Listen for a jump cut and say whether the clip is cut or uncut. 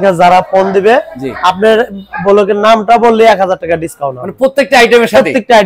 uncut